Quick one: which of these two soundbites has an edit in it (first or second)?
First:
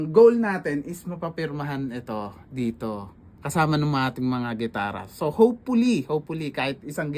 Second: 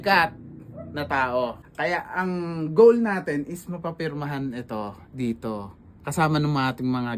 second